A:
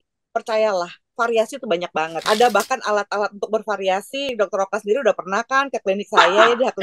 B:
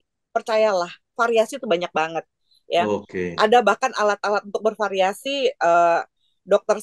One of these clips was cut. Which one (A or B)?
A